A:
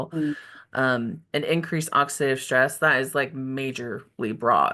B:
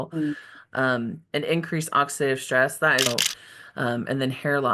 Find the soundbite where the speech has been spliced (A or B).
B